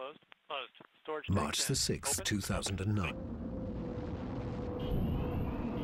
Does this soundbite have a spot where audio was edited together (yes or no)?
no